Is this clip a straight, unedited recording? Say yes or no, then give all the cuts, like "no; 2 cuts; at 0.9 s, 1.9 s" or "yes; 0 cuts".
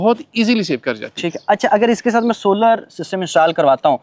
yes; 0 cuts